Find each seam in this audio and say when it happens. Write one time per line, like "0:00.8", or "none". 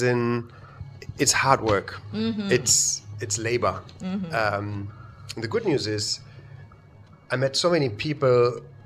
none